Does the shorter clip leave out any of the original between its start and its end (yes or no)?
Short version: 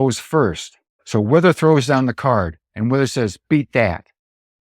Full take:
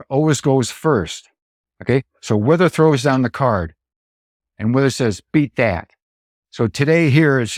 yes